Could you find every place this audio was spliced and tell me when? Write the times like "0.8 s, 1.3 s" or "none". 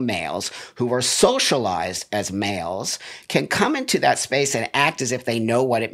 none